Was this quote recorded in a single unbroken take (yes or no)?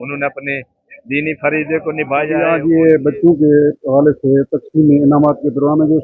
no